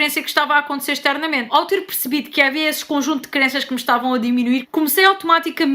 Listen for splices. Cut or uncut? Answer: cut